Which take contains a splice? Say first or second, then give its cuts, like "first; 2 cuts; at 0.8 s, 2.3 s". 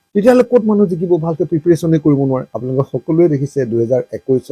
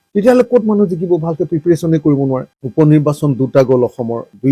second; 1 cut; at 2.6 s